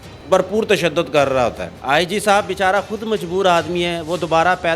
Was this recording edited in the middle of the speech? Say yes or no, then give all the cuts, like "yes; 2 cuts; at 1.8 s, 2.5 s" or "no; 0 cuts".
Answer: yes; 1 cut; at 1.7 s